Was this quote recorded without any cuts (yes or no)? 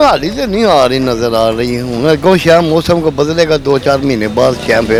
yes